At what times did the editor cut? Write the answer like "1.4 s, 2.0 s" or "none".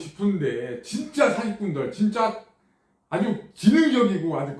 none